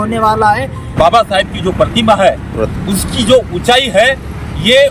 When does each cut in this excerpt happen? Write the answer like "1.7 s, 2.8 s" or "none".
0.9 s